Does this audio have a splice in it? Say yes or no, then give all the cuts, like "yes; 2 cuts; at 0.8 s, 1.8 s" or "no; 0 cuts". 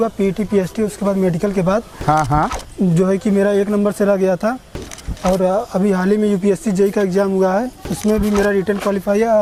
no; 0 cuts